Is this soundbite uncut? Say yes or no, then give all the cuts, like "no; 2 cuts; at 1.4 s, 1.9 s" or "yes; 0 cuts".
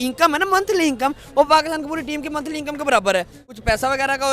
no; 1 cut; at 3.4 s